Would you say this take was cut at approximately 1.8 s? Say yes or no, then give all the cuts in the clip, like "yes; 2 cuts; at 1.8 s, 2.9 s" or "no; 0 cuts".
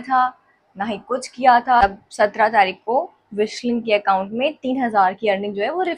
yes; 1 cut; at 1.8 s